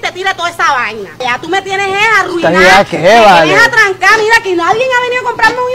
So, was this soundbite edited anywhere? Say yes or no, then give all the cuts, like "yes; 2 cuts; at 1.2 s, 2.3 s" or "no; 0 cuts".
no; 0 cuts